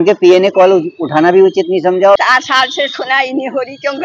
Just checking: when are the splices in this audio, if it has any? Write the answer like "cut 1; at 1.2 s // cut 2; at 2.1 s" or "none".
cut 1; at 2.2 s